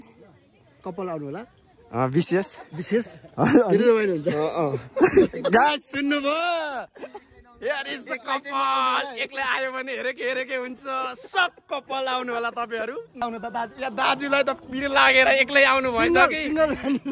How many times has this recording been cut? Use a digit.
1